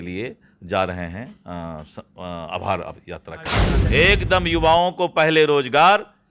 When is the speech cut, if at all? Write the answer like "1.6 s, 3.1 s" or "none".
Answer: 3.6 s